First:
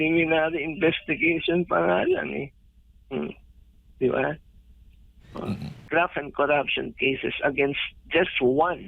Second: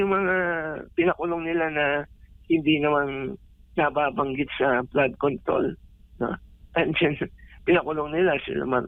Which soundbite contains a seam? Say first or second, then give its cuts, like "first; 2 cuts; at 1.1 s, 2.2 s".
first; 1 cut; at 5.7 s